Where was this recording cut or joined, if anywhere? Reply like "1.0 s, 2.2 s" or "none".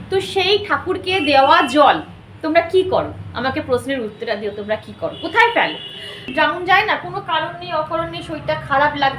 6.3 s